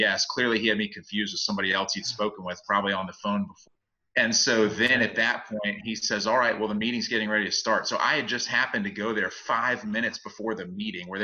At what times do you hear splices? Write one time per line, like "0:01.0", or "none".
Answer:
0:03.6